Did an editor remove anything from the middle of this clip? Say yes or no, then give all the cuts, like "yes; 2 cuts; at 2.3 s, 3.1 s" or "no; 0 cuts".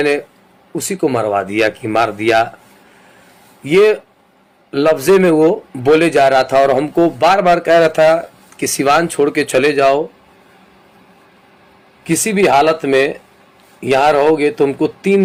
no; 0 cuts